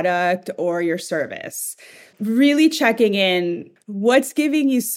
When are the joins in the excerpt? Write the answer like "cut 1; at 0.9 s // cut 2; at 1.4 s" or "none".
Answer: cut 1; at 2.1 s // cut 2; at 3.7 s

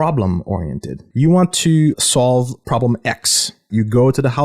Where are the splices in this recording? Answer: cut 1; at 1.0 s // cut 2; at 2.6 s // cut 3; at 3.7 s

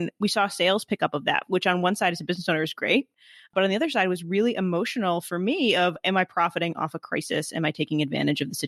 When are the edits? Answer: none

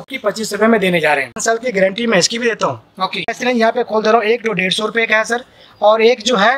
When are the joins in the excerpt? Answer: cut 1; at 1.4 s // cut 2; at 3.4 s

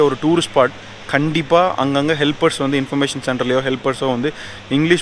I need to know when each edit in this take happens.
none

